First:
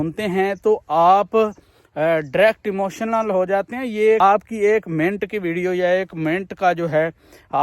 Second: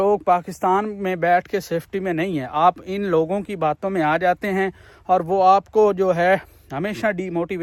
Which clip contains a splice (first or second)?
first